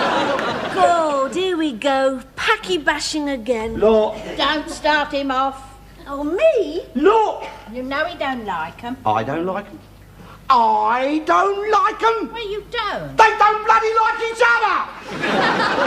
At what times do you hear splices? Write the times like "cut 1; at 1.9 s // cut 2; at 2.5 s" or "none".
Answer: cut 1; at 2.4 s